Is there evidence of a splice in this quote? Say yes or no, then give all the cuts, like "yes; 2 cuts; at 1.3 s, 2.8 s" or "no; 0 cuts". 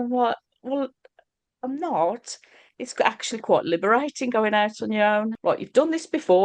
yes; 1 cut; at 5.3 s